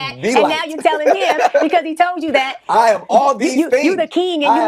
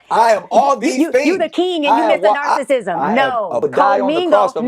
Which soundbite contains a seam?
second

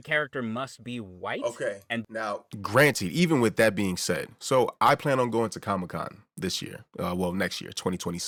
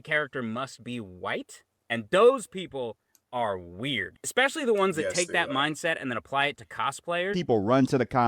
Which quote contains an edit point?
second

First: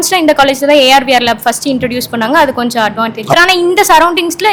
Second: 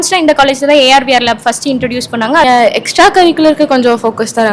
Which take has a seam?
second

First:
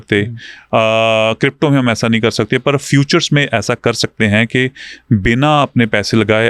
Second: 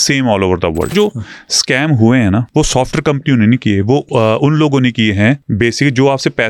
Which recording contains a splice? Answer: second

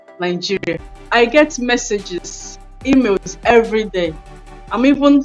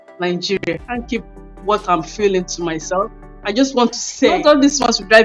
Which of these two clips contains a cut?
second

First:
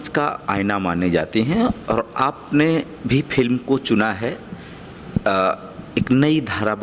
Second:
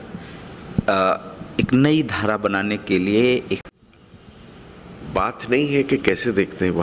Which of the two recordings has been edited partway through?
second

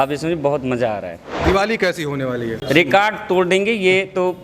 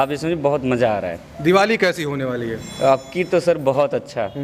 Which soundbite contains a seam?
first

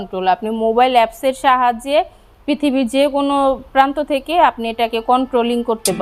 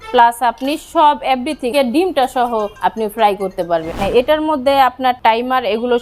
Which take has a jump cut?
second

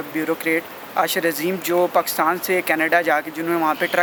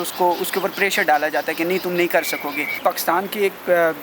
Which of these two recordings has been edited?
second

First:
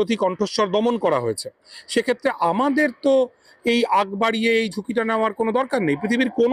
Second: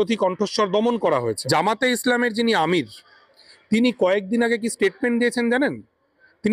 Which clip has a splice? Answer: second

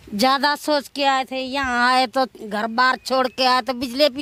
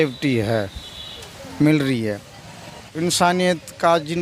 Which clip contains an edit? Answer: second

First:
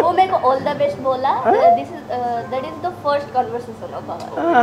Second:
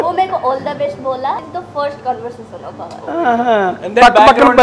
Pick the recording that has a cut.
second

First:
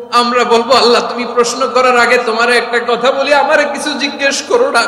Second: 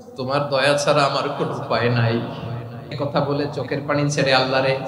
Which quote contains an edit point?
second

